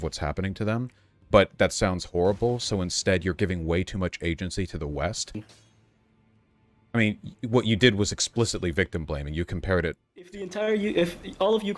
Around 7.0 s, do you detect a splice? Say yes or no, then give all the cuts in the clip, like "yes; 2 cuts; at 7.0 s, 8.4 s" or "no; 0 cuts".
no; 2 cuts; at 5.4 s, 10.5 s